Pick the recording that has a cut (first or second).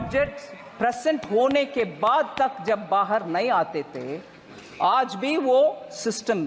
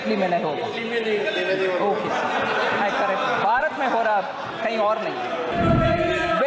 second